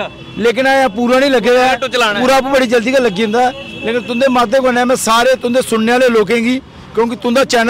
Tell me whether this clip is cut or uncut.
uncut